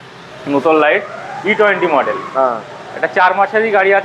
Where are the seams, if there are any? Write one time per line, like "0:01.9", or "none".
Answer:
none

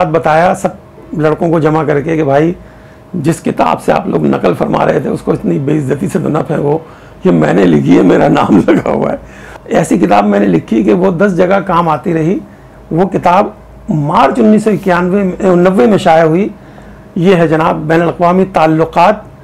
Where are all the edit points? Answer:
0:09.5

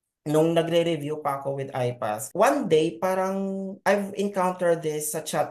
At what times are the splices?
0:02.2

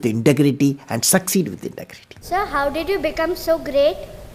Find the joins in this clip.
0:02.2

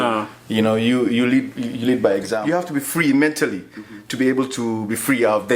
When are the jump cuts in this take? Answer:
0:02.4

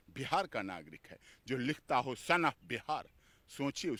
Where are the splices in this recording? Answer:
none

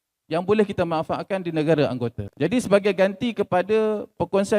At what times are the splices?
0:02.2

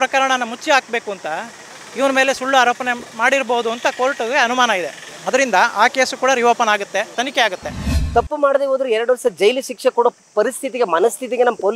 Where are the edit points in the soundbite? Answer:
0:07.5

